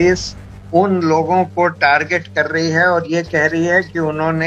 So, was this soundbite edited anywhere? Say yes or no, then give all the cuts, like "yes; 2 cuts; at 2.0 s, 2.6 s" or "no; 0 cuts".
no; 0 cuts